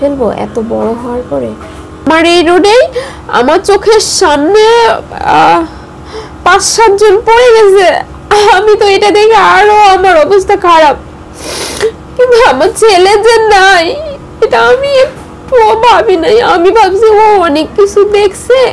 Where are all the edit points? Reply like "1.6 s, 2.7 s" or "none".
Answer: 1.8 s